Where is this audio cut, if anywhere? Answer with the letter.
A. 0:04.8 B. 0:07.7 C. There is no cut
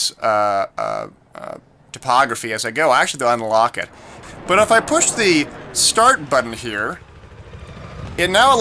A